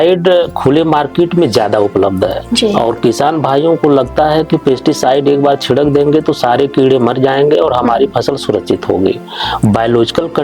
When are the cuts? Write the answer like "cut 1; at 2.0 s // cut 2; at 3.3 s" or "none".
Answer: none